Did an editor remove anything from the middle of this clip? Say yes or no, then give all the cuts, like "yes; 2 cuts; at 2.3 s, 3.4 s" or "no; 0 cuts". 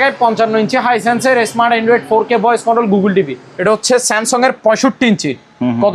yes; 1 cut; at 3.4 s